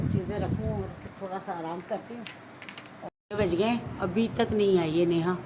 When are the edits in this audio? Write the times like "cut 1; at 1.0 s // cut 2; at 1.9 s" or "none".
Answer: cut 1; at 3.1 s